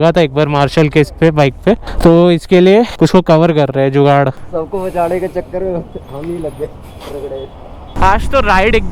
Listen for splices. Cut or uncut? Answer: uncut